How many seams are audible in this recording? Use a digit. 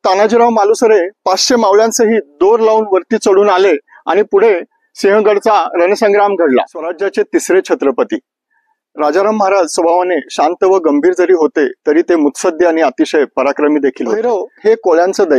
2